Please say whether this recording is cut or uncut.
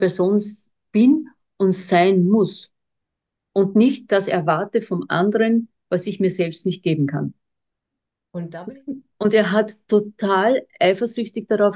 cut